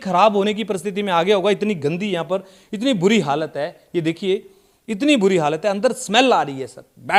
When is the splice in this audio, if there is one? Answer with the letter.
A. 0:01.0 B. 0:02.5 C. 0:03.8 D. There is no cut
D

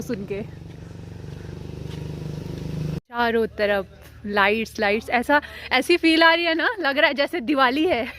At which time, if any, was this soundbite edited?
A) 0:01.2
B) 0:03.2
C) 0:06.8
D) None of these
B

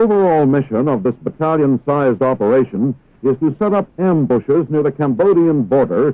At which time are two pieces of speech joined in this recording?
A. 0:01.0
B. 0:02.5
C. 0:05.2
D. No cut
C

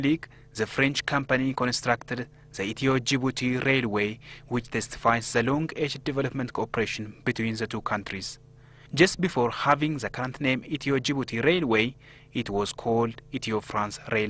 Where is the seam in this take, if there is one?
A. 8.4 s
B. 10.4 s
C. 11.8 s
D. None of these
C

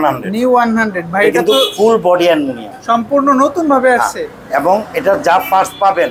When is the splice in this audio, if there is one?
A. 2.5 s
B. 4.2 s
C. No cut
C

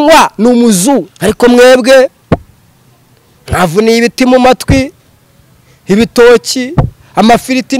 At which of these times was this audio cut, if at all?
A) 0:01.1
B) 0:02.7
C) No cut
A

